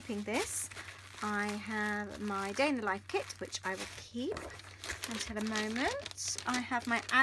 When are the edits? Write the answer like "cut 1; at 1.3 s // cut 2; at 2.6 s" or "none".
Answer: cut 1; at 2.1 s